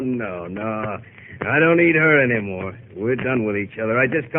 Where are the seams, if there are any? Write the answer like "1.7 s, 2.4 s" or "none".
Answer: 2.1 s